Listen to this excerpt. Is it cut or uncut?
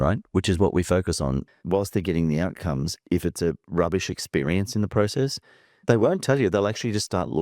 cut